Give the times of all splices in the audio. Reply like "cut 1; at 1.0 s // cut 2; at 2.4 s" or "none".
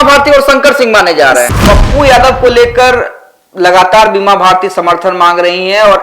cut 1; at 1.5 s